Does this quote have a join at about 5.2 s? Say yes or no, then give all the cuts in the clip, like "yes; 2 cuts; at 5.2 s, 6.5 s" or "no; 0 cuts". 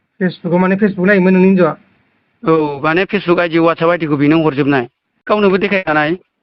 yes; 1 cut; at 5.2 s